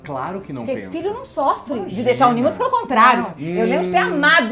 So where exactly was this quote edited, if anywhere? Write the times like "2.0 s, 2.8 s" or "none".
none